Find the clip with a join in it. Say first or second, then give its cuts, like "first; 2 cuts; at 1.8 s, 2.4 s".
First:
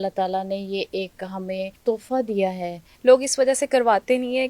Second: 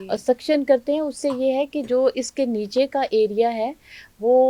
first; 2 cuts; at 1.8 s, 2.9 s